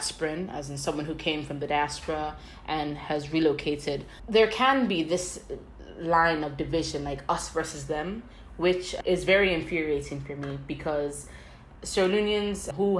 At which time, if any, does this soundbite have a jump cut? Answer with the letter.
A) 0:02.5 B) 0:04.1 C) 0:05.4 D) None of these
B